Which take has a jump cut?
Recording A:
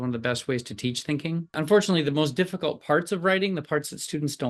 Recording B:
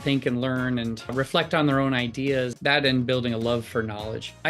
B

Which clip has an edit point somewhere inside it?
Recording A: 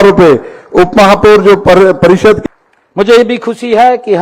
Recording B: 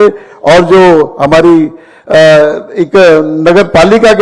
A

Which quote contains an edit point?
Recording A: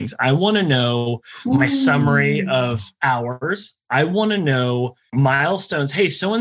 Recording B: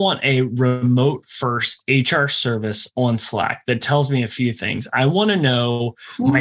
A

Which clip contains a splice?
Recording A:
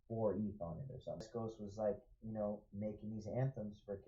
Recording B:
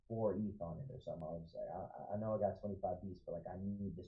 A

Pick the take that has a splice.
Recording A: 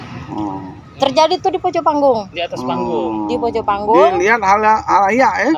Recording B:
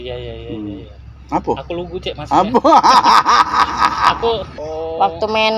B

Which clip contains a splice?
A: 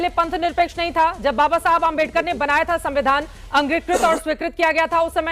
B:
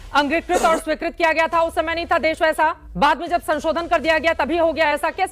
B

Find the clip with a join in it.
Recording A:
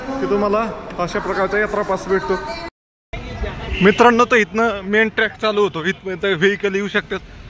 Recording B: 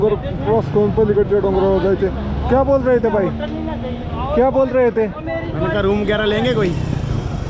A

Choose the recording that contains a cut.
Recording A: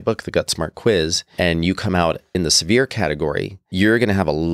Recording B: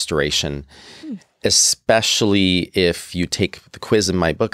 A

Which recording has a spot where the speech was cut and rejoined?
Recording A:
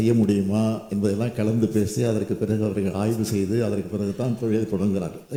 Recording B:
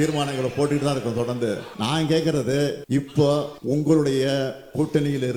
B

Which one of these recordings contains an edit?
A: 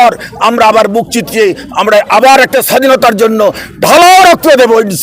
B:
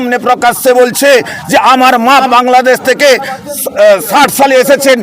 B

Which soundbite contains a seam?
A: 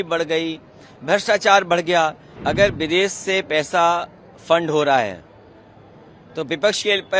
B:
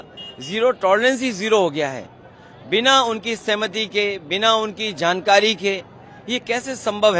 A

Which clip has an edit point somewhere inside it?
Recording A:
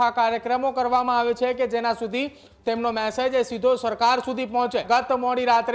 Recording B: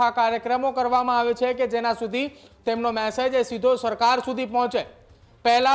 A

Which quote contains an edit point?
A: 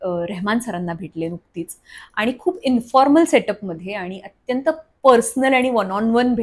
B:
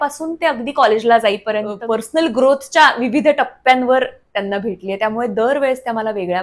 B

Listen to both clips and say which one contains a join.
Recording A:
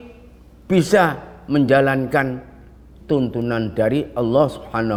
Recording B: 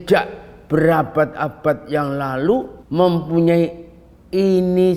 B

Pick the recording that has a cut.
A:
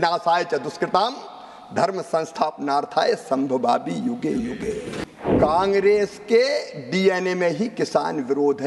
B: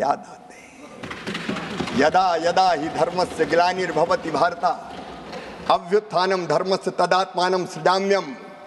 A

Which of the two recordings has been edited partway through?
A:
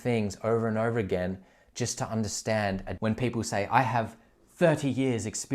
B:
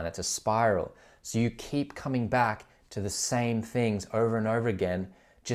A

